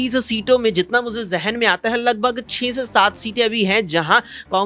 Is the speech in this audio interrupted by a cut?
no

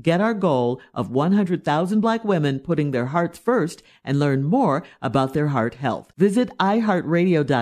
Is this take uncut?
yes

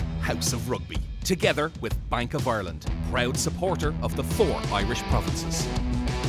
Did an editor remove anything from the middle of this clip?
no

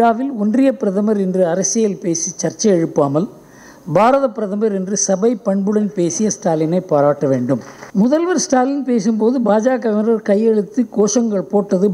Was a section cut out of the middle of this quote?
yes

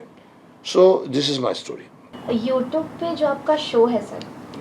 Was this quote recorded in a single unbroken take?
yes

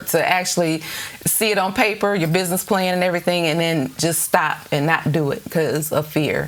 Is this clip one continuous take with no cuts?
yes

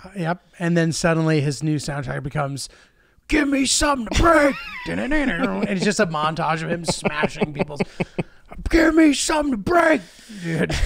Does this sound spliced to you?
no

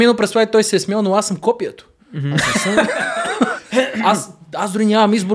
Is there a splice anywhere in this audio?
no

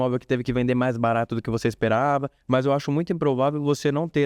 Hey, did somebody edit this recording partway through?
yes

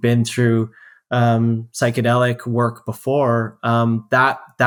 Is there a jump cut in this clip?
no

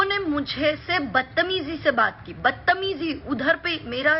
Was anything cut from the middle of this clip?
no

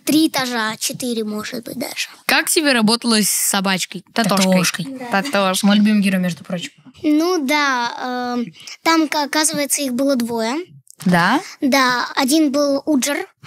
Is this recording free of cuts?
yes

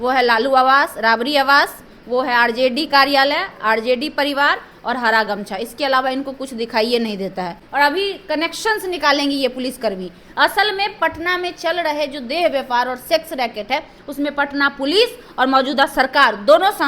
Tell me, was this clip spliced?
yes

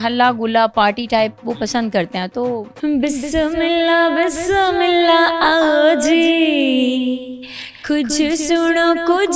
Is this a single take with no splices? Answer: no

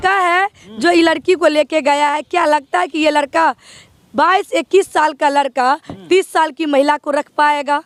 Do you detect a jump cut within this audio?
no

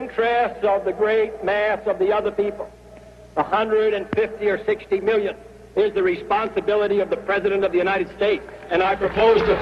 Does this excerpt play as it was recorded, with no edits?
no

